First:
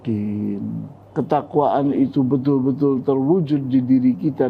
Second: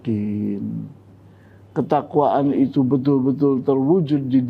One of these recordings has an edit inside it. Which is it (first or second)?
first